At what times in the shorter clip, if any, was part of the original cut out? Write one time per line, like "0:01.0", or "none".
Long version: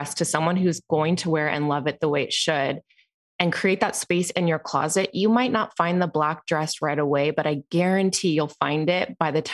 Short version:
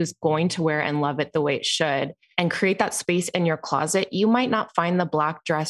0:02.2